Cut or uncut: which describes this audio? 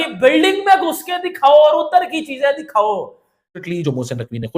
cut